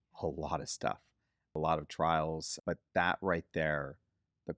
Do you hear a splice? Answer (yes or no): yes